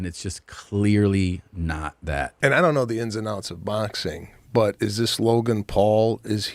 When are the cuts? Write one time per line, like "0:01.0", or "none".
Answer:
0:02.3